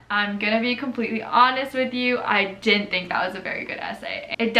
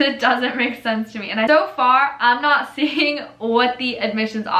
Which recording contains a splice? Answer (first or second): second